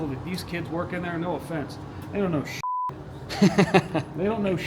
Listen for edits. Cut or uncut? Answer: uncut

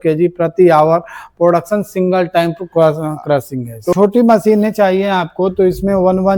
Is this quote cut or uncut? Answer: cut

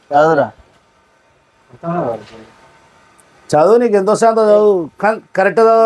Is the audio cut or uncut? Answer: uncut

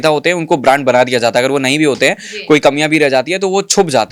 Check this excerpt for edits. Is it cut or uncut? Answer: uncut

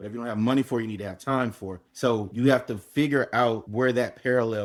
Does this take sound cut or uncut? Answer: uncut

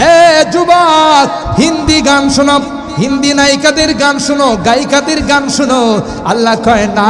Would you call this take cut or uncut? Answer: uncut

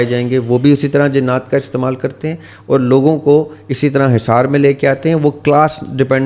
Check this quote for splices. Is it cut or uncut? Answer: uncut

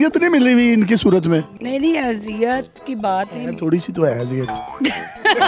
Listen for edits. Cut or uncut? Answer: uncut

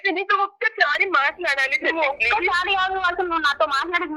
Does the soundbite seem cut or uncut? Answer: uncut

